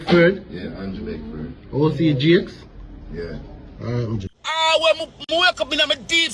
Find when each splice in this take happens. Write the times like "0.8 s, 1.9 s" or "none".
4.3 s